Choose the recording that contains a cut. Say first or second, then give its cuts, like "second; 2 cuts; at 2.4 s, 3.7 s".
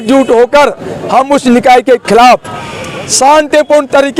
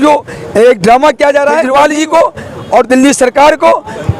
second; 1 cut; at 1.7 s